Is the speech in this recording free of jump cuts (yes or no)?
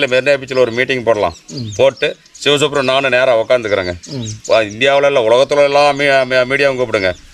yes